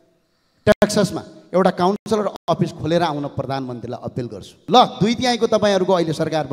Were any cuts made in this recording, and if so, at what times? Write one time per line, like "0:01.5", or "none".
0:04.4